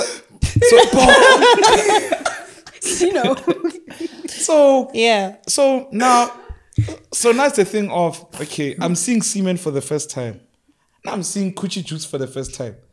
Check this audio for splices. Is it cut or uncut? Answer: uncut